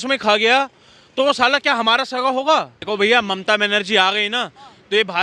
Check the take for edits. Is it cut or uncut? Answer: cut